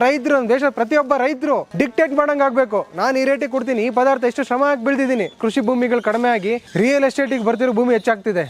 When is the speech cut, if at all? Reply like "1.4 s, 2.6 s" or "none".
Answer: 1.7 s, 5.4 s, 6.6 s